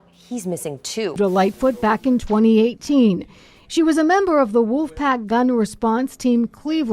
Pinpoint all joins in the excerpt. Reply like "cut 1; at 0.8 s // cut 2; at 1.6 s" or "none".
cut 1; at 1.2 s

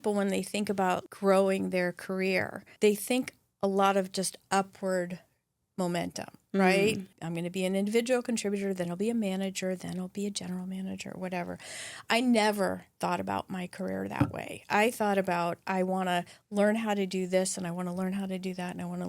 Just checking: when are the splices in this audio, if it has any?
cut 1; at 1.0 s // cut 2; at 2.7 s // cut 3; at 7.1 s

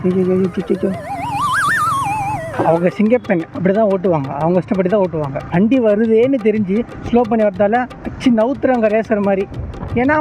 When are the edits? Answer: cut 1; at 1.0 s // cut 2; at 2.5 s

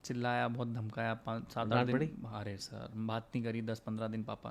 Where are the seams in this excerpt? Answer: none

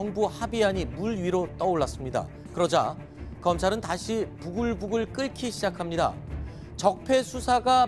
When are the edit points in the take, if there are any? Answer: none

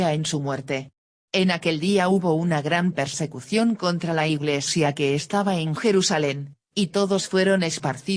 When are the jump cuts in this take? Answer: cut 1; at 0.9 s

